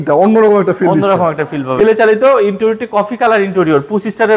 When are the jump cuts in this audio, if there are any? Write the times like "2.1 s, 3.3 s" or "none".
1.7 s